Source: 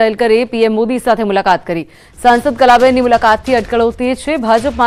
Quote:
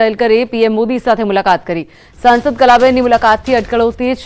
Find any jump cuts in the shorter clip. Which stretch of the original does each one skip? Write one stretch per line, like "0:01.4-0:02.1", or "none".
none